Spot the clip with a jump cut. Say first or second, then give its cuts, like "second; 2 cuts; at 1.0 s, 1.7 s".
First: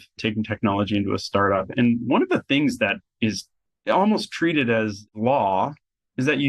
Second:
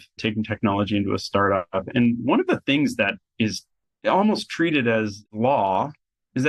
first; 1 cut; at 1.7 s